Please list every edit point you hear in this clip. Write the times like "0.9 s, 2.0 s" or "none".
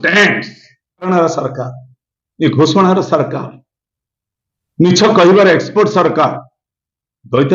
1.1 s